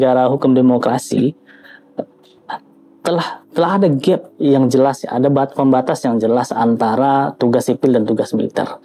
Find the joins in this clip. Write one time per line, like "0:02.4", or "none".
none

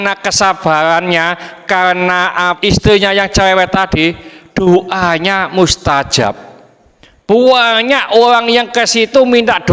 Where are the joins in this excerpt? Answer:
0:02.6

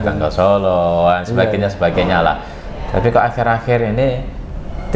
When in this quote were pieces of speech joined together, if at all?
none

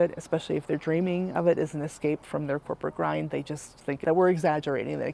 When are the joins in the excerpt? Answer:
none

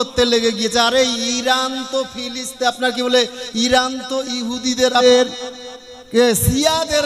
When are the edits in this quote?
0:05.0

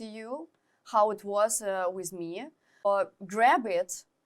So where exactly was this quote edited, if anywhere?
0:02.8

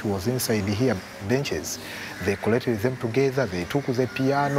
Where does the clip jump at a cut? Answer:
0:01.4
0:03.6

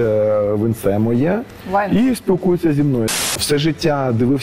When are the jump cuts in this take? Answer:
0:03.1

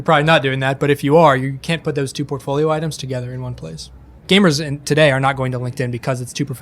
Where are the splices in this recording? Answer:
0:04.1

